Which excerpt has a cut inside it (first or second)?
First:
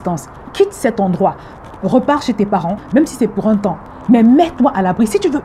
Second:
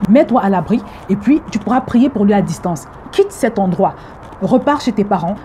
first